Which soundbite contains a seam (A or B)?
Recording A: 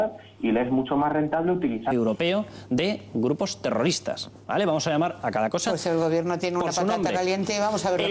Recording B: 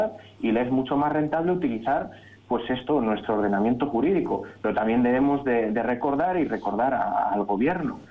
B